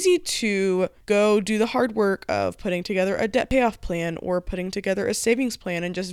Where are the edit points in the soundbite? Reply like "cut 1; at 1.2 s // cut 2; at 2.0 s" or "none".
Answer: cut 1; at 1.0 s